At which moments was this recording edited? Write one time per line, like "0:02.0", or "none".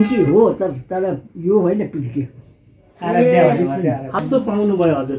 0:04.2

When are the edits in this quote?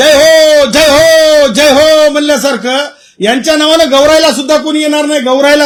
none

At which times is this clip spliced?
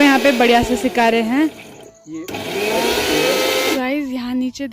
0:03.7

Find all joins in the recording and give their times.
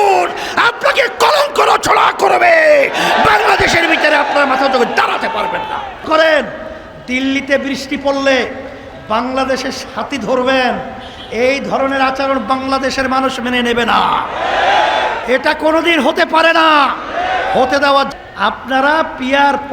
0:06.0
0:18.1

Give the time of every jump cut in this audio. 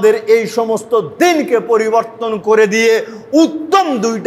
none

